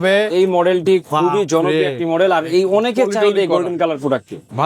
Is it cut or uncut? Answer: uncut